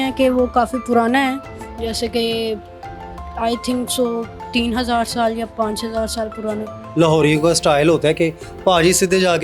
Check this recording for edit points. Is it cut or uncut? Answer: cut